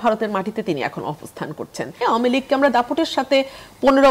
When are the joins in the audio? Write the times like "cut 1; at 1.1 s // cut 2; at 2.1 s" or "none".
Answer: cut 1; at 2.0 s